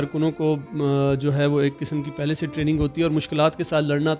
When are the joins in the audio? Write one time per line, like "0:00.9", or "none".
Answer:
none